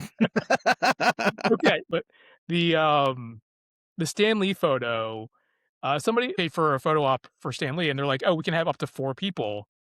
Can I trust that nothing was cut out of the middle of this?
no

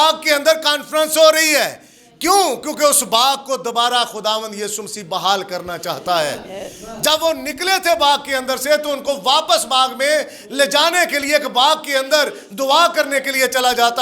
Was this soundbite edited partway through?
no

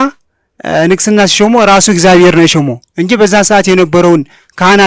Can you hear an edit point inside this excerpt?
no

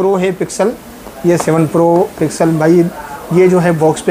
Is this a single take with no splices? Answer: yes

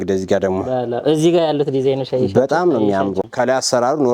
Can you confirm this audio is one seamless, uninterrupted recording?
no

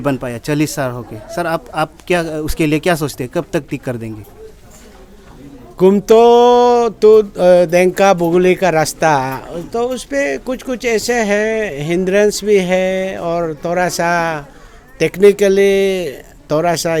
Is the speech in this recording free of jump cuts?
yes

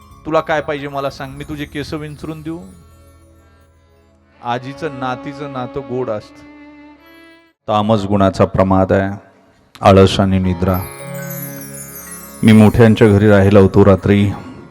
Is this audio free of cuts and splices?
no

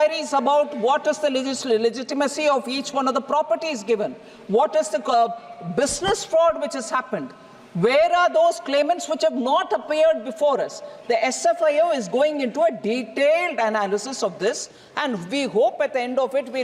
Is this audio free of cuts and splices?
yes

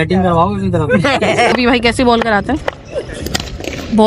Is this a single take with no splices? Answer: no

